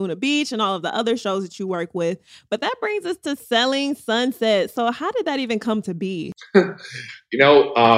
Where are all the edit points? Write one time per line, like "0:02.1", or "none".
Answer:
0:06.3